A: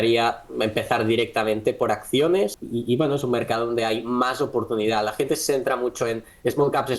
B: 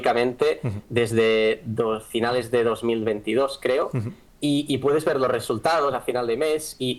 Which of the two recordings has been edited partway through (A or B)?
A